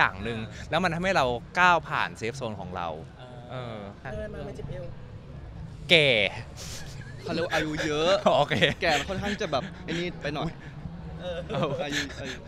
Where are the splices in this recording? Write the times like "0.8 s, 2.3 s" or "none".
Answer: 4.0 s